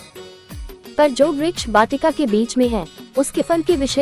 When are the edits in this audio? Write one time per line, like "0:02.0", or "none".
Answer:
0:00.9